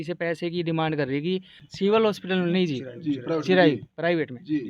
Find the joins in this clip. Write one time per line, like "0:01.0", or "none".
none